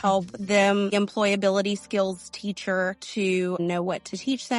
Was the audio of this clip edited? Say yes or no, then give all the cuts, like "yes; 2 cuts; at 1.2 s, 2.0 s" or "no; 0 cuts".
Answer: yes; 2 cuts; at 0.9 s, 3.6 s